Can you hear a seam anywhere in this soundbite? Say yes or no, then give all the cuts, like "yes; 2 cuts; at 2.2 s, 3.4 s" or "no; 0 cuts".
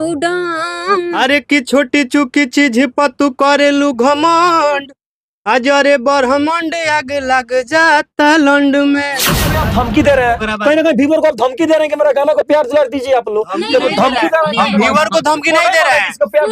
yes; 2 cuts; at 1.2 s, 9.5 s